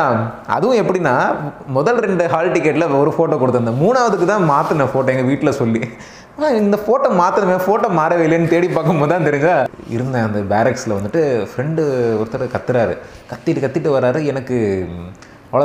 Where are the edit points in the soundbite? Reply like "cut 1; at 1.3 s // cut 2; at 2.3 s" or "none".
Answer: cut 1; at 9.8 s